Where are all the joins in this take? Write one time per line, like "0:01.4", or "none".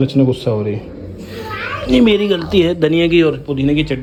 none